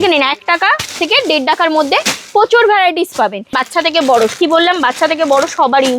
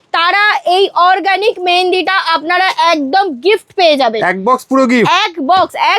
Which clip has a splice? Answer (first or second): first